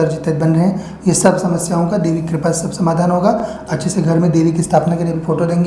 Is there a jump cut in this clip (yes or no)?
no